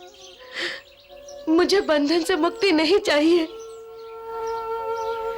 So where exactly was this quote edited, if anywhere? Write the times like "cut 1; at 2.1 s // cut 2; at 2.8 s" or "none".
none

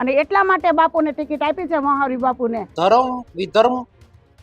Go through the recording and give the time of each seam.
cut 1; at 2.7 s

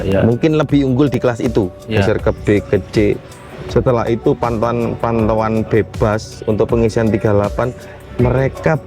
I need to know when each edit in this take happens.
cut 1; at 2.0 s

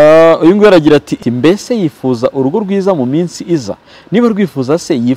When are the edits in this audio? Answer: cut 1; at 1.1 s

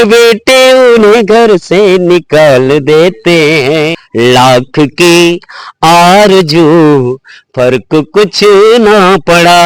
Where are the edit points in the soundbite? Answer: cut 1; at 4.0 s

